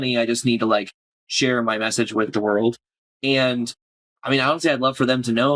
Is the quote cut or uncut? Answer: cut